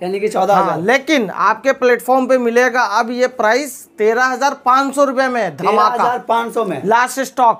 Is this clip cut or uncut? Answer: uncut